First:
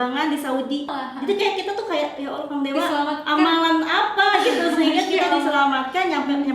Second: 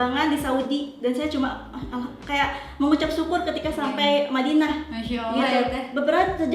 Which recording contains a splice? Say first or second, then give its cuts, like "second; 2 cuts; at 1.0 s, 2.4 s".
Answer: first; 1 cut; at 0.9 s